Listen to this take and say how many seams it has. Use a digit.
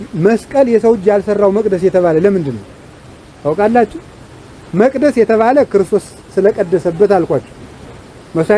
0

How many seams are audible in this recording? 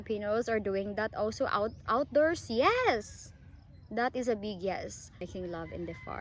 1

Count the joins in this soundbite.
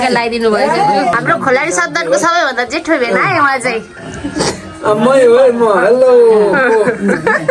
1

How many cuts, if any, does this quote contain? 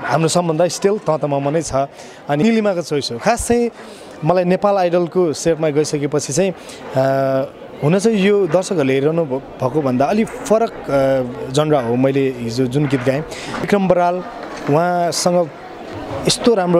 2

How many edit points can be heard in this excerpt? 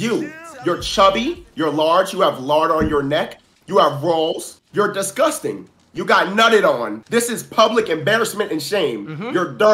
2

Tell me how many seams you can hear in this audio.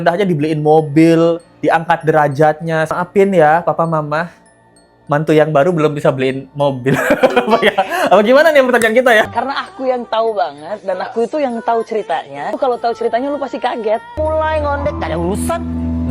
4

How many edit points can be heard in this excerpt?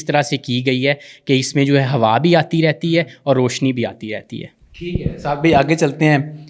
0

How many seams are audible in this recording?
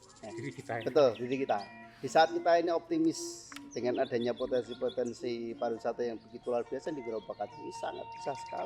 0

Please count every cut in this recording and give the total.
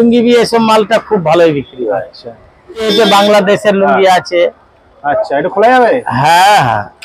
1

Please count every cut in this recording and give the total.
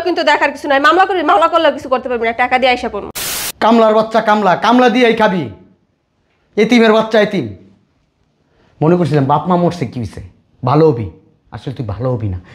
1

